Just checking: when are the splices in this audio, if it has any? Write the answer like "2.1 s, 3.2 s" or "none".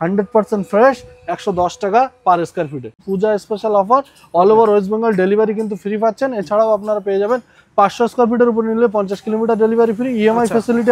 3.0 s